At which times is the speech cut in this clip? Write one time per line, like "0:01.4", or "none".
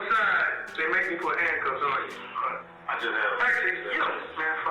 0:02.2